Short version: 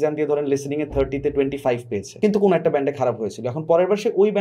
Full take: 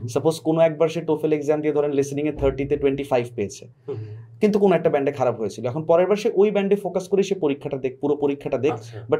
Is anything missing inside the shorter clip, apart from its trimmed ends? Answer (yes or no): yes